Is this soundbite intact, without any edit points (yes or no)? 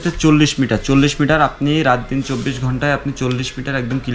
yes